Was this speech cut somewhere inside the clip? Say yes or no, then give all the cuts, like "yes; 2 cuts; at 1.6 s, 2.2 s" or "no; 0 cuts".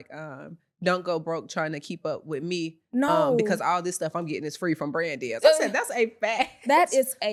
no; 0 cuts